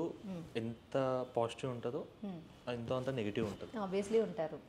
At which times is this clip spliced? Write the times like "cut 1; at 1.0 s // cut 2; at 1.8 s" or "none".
none